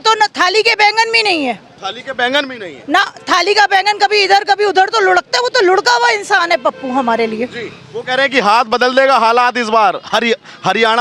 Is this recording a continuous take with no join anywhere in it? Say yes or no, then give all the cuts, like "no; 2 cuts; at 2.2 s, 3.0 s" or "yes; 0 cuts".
yes; 0 cuts